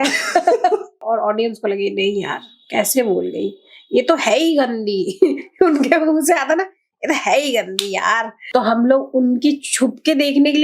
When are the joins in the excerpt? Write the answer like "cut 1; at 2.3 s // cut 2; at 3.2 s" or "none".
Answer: cut 1; at 0.9 s // cut 2; at 8.3 s